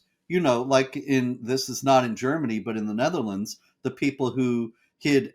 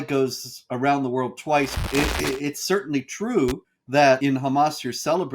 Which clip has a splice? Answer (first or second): second